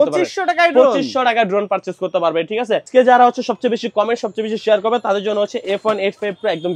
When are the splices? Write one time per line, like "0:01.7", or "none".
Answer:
0:02.9